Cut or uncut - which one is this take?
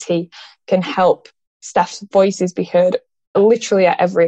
cut